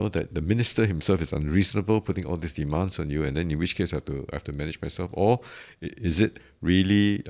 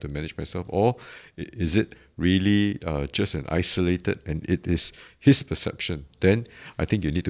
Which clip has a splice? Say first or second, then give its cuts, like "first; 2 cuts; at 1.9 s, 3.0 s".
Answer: second; 1 cut; at 6.1 s